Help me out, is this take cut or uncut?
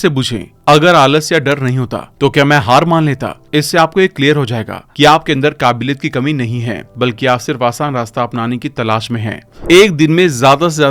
cut